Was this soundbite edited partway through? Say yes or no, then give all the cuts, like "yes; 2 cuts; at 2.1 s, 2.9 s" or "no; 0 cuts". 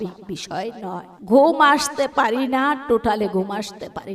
yes; 1 cut; at 1.1 s